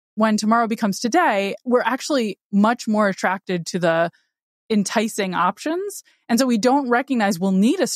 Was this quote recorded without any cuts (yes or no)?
no